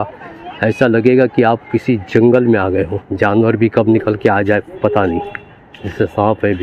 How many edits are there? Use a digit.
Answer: 1